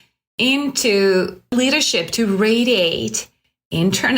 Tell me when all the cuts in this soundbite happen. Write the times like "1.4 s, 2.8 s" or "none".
1.6 s